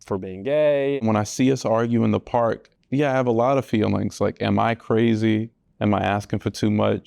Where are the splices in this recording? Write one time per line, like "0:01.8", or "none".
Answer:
0:01.0
0:02.7